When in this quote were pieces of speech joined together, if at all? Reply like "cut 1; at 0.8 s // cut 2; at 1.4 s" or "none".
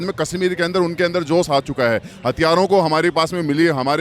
none